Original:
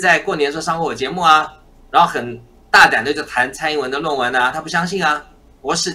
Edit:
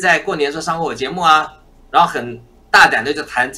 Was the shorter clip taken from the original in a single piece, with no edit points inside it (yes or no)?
yes